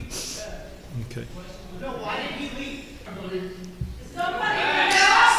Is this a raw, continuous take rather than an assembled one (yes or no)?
no